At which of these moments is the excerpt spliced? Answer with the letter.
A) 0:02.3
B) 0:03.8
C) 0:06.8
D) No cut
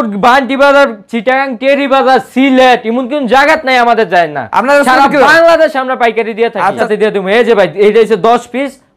C